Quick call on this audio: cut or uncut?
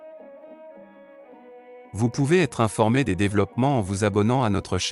cut